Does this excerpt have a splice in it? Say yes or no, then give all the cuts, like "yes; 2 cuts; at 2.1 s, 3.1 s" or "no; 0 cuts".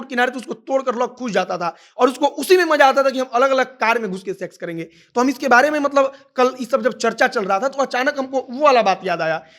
no; 0 cuts